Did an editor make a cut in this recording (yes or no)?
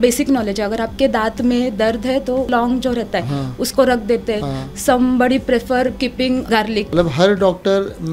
yes